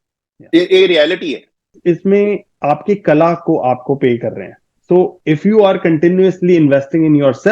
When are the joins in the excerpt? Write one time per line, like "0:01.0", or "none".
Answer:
0:01.7